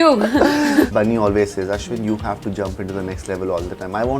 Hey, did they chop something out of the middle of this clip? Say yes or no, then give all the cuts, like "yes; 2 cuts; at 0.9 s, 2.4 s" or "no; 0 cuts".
yes; 1 cut; at 0.9 s